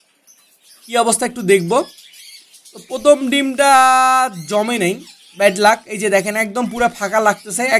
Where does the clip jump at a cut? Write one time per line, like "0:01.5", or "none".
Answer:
none